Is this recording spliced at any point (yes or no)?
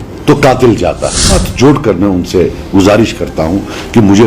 yes